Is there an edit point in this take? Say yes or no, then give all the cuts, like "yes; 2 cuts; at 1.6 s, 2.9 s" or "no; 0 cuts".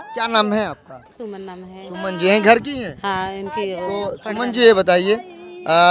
no; 0 cuts